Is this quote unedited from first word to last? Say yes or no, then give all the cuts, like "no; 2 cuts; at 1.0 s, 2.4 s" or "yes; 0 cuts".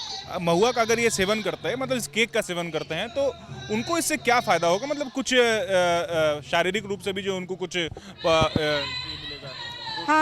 yes; 0 cuts